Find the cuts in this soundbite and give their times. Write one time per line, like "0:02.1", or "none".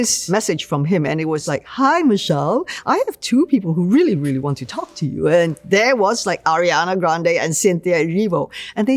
0:01.5